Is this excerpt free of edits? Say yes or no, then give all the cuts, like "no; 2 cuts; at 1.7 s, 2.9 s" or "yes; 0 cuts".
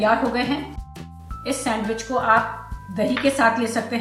no; 1 cut; at 1.0 s